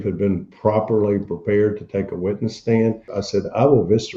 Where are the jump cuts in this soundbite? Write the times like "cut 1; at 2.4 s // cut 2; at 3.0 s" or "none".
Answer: cut 1; at 3.2 s